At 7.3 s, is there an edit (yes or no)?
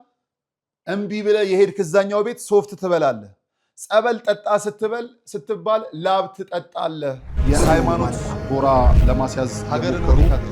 yes